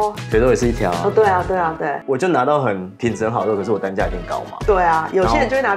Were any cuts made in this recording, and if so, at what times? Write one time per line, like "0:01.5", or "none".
0:02.0